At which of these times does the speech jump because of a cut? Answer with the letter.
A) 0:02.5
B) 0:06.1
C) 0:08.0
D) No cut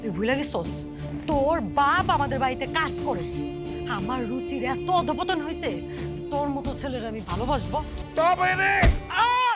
C